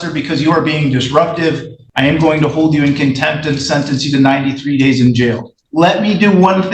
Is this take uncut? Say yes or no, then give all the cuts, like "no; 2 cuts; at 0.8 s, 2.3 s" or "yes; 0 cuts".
no; 2 cuts; at 1.8 s, 5.5 s